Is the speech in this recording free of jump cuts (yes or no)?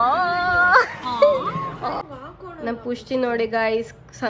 no